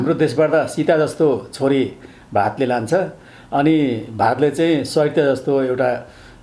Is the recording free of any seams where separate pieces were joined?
yes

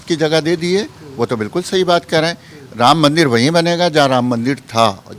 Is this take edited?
no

